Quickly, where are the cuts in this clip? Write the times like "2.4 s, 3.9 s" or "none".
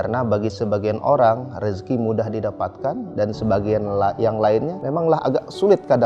4.8 s